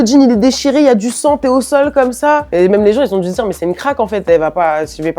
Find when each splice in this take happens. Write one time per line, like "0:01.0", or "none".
none